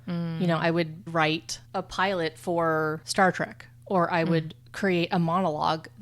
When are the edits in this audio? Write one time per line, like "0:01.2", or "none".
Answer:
0:01.1
0:03.0